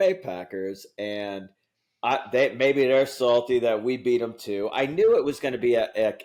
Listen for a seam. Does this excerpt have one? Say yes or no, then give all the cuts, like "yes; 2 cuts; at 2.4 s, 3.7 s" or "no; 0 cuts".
no; 0 cuts